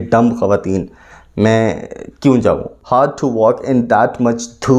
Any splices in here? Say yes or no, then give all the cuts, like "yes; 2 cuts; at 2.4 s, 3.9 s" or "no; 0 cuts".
yes; 1 cut; at 2.8 s